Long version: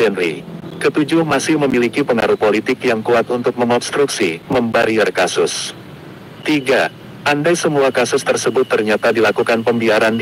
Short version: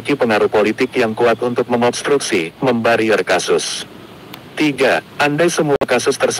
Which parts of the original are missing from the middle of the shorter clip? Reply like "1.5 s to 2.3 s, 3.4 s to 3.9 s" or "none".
7.0 s to 7.2 s